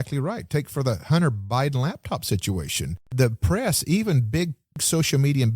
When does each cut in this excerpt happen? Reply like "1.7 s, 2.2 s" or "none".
3.1 s, 4.8 s